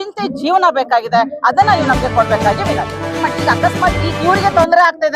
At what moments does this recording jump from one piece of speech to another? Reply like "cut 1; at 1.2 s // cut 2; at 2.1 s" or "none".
cut 1; at 3.2 s